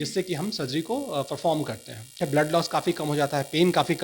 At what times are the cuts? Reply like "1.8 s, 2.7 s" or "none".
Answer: 2.2 s